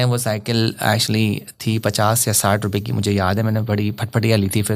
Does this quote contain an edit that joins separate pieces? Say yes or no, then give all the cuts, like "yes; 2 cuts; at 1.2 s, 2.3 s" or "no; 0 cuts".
no; 0 cuts